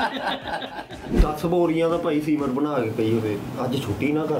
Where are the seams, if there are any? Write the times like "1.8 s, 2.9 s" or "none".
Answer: 1.2 s